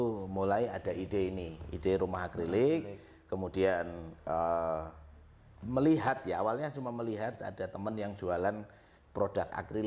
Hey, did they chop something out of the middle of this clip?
no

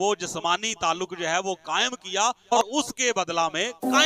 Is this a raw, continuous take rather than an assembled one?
no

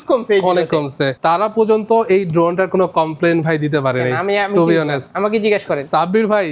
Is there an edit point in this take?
yes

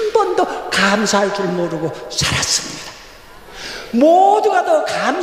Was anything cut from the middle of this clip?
no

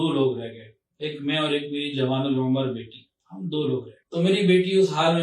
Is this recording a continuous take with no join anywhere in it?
no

